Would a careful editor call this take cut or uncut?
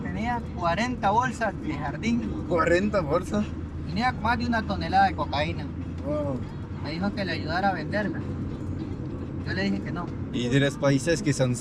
uncut